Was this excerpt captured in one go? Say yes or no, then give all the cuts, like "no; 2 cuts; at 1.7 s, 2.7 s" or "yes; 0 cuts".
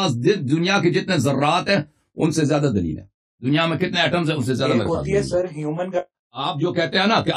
no; 1 cut; at 6.2 s